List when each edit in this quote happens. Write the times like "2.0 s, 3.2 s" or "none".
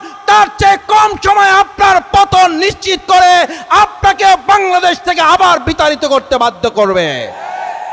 none